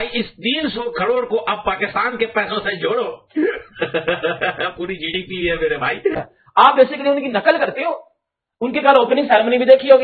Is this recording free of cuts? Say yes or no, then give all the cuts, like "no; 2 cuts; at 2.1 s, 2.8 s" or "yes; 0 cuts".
no; 1 cut; at 6.1 s